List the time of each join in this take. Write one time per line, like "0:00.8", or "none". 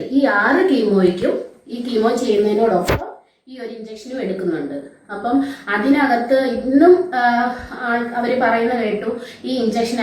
none